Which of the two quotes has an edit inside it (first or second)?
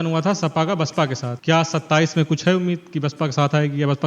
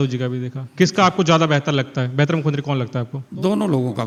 first